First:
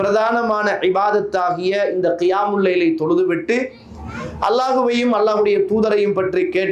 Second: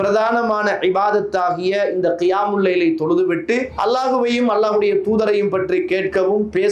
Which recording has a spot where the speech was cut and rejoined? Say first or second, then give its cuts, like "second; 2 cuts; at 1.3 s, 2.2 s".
second; 1 cut; at 3.7 s